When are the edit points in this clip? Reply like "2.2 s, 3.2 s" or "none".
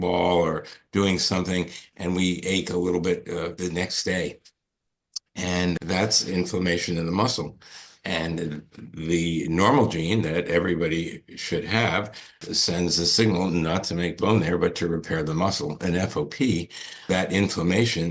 3.5 s, 5.8 s, 12.4 s, 17.1 s